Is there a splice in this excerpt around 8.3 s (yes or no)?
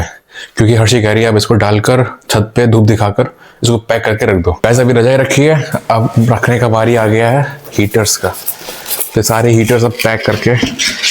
no